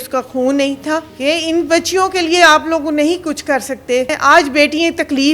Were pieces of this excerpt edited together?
yes; 2 cuts; at 1.1 s, 4.2 s

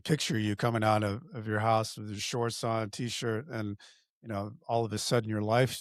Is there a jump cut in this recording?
no; 0 cuts

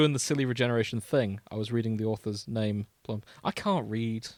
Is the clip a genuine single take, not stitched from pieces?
yes; 0 cuts

